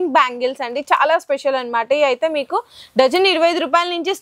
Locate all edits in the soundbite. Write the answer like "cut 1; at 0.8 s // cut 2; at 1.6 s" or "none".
none